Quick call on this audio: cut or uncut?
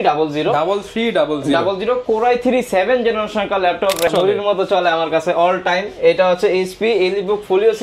cut